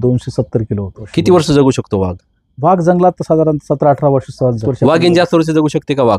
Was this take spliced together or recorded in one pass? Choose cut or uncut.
cut